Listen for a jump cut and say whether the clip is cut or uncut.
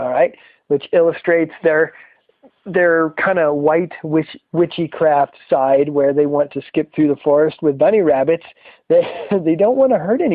cut